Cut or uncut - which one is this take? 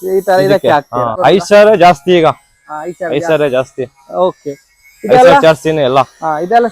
cut